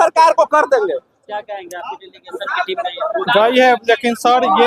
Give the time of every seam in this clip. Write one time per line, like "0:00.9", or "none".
none